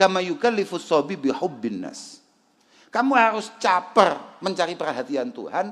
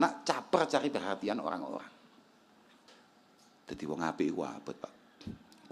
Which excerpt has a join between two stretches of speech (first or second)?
second